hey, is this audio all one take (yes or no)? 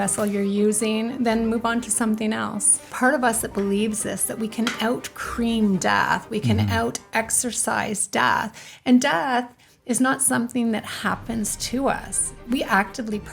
no